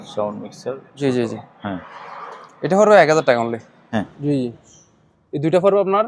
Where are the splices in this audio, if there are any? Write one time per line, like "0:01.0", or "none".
0:03.9